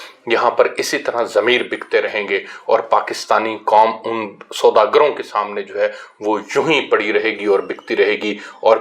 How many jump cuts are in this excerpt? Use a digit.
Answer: 0